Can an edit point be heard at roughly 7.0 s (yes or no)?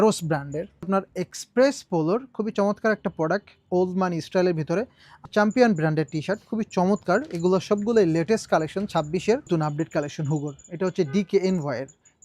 no